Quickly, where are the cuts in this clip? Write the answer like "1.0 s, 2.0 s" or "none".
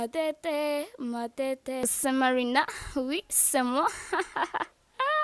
1.8 s